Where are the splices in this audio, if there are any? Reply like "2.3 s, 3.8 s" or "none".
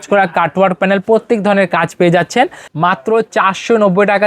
2.6 s